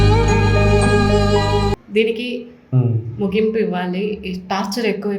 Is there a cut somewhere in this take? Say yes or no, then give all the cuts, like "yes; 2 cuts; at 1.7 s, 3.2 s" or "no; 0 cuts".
yes; 1 cut; at 1.7 s